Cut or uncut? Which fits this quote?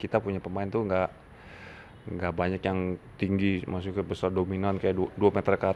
uncut